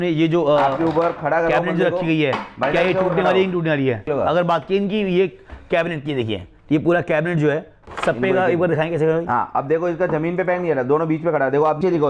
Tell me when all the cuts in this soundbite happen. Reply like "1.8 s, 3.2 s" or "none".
none